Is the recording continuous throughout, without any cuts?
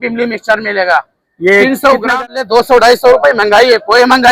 no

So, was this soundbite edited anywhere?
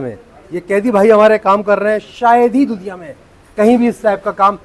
no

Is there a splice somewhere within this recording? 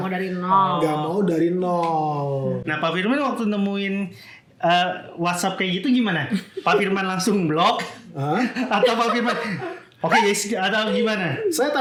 no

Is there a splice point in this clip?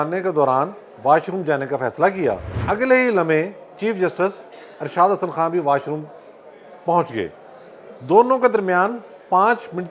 yes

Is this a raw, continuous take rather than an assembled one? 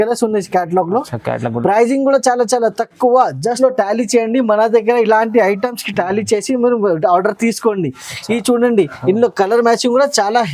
no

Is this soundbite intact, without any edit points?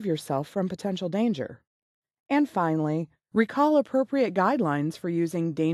no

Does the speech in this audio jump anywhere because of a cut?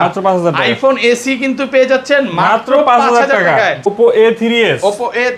yes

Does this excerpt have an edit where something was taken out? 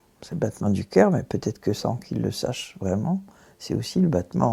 no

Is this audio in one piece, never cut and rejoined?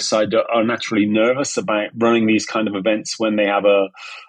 no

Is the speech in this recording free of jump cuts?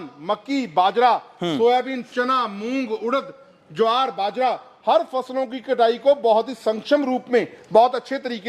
yes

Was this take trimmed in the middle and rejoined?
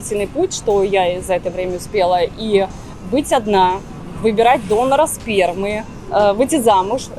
yes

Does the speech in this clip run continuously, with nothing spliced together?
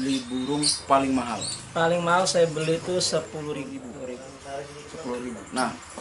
no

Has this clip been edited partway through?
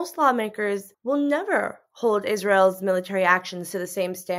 no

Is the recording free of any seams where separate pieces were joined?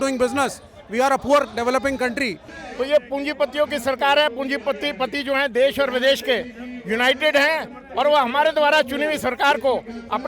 no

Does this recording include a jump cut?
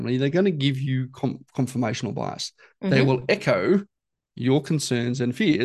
no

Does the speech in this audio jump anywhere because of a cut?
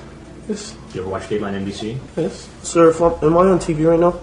yes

